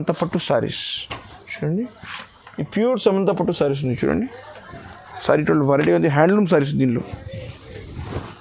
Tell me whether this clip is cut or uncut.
uncut